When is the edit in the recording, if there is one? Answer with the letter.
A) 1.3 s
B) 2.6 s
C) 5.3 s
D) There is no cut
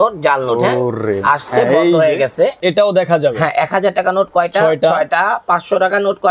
B